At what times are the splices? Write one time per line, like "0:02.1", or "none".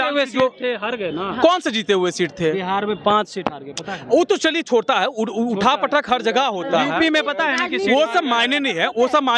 none